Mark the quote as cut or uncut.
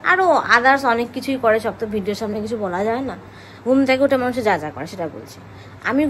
uncut